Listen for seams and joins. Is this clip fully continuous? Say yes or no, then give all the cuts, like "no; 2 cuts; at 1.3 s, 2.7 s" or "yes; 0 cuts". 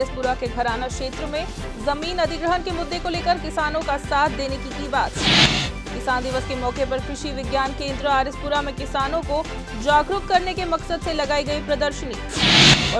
no; 1 cut; at 5.4 s